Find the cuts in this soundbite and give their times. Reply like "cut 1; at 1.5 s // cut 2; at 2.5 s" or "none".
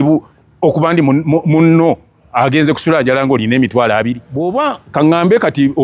cut 1; at 4.3 s